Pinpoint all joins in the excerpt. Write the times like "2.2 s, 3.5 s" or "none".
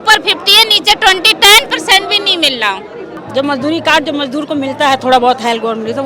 3.2 s